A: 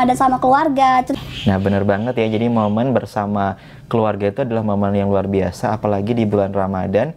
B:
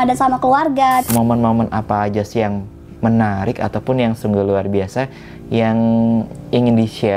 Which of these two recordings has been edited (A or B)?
B